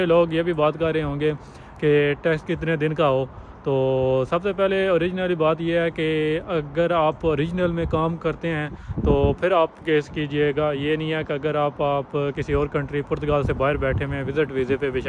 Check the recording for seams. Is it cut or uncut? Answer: uncut